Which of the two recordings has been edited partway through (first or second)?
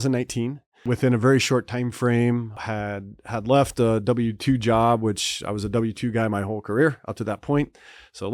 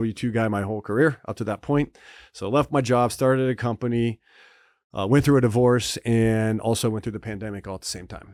first